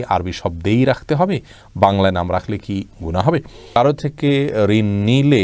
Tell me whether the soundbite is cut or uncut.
cut